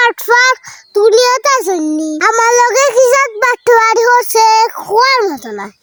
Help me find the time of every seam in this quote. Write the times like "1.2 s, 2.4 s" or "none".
none